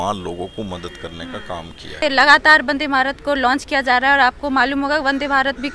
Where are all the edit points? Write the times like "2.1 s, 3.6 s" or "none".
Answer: none